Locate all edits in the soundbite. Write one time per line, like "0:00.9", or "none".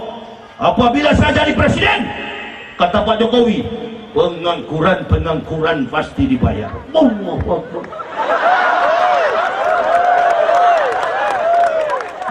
none